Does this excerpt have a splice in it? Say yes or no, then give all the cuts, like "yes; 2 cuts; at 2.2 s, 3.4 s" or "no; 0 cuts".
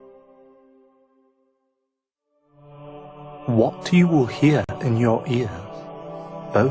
yes; 1 cut; at 1.7 s